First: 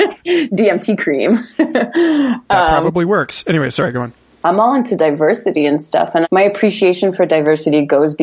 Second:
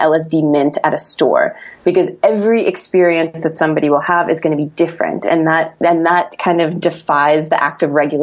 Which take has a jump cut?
first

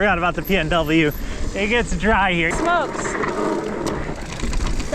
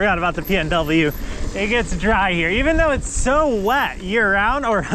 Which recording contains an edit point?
first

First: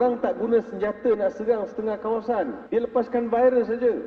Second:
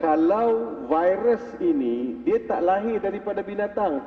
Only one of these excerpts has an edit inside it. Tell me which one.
first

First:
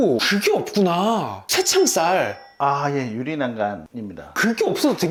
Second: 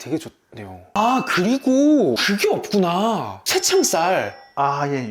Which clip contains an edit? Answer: second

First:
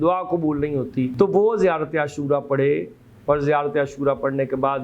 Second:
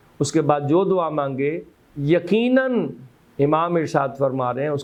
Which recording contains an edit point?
first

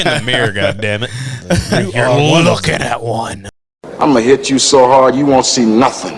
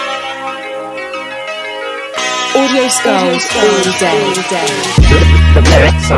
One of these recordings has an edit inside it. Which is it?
first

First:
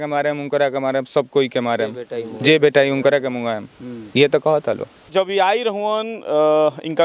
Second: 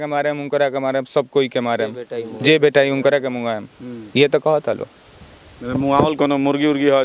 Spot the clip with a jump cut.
first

